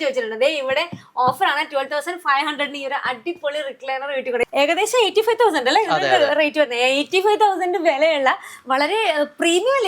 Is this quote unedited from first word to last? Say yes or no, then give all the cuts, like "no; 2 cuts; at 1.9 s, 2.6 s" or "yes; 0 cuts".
no; 1 cut; at 4.4 s